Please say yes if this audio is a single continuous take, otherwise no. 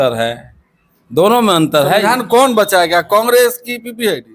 yes